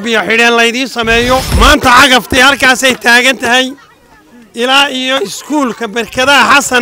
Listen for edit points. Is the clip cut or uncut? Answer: cut